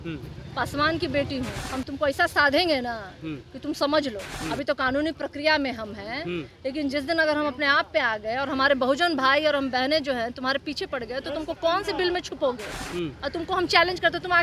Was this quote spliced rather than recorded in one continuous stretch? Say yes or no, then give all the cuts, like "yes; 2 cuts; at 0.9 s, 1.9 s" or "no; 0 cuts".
yes; 3 cuts; at 1.6 s, 4.3 s, 12.7 s